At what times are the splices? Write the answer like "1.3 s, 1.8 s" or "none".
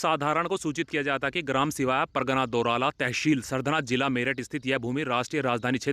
none